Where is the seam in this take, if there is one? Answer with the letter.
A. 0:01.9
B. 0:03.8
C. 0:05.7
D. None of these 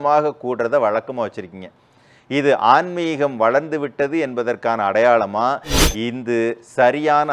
C